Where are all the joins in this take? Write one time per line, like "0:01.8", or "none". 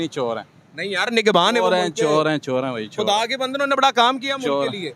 none